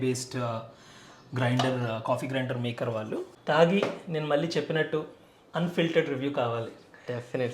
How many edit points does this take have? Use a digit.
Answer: 1